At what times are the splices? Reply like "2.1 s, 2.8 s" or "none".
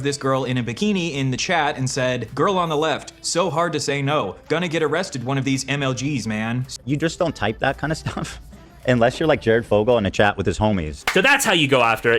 6.7 s, 11.0 s